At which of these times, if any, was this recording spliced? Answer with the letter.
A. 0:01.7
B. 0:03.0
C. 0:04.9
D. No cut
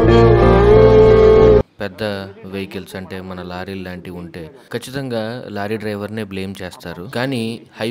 A